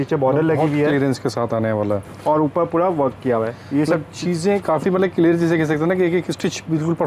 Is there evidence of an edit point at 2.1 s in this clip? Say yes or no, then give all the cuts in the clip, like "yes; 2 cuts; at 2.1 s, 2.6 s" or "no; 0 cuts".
no; 0 cuts